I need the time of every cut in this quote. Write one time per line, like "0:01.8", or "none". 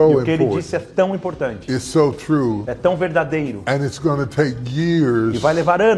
none